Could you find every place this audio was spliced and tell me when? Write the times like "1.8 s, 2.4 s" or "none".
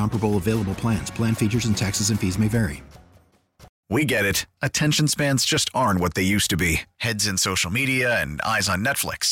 3.7 s